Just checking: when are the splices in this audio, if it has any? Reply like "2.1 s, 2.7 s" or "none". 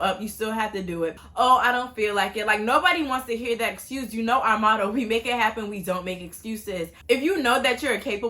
1.2 s, 7.0 s

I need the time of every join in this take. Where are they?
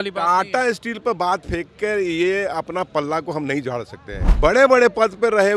4.3 s

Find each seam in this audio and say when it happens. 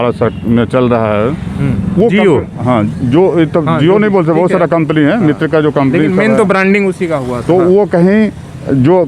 none

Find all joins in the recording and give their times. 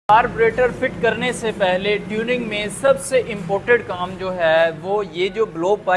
none

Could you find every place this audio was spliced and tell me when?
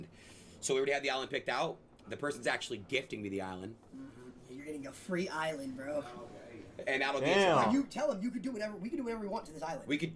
none

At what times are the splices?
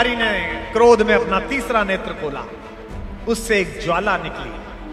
none

